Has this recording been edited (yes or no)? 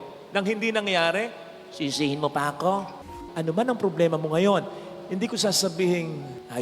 yes